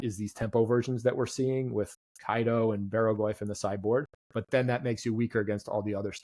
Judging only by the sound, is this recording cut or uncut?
uncut